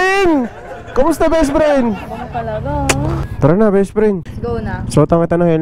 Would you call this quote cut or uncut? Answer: cut